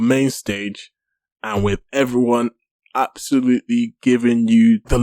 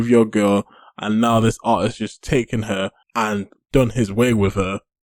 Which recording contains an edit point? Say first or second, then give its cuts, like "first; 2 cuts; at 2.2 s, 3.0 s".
second; 1 cut; at 3.0 s